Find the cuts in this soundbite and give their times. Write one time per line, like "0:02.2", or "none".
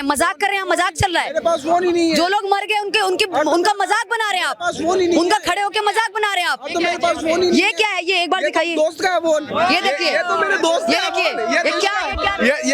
none